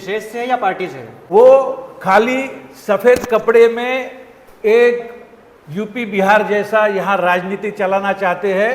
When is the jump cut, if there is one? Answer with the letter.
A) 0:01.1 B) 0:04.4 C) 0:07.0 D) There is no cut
A